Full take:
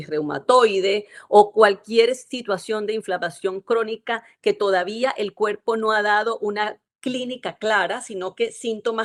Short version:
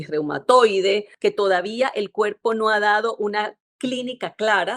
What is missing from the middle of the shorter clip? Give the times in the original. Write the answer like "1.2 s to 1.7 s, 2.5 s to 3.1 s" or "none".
1.1 s to 4.3 s